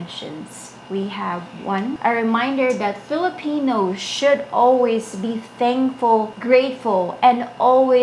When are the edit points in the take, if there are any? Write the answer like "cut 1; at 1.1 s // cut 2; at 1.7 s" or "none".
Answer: cut 1; at 2.0 s

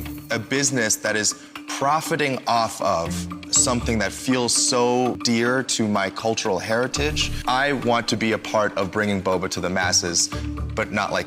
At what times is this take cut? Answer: cut 1; at 5.2 s // cut 2; at 7.3 s

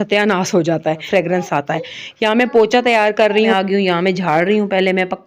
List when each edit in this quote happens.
cut 1; at 1.0 s // cut 2; at 3.5 s

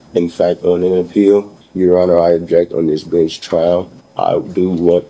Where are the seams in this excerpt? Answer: cut 1; at 1.6 s // cut 2; at 4.0 s

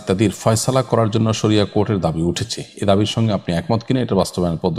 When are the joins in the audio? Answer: none

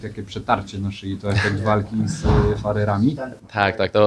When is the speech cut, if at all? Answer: none

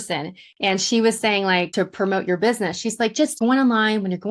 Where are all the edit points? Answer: cut 1; at 1.7 s // cut 2; at 3.4 s

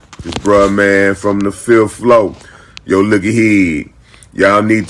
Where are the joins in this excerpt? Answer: none

